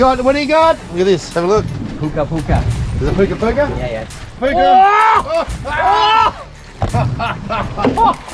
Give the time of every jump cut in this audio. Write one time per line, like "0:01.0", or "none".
0:04.3